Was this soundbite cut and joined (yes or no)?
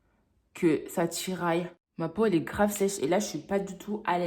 yes